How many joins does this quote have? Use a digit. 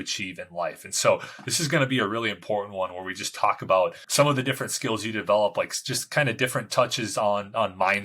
1